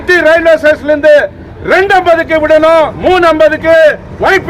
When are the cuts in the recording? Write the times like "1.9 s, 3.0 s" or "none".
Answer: 2.9 s